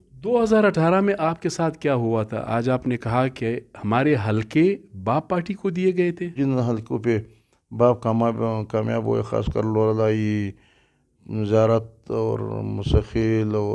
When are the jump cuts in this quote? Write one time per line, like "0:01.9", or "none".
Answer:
0:06.3